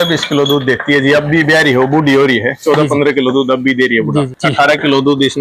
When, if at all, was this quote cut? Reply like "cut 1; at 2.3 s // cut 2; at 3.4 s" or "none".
cut 1; at 4.4 s